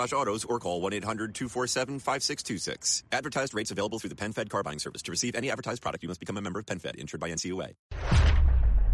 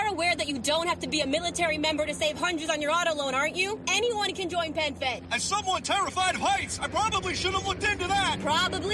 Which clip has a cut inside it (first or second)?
first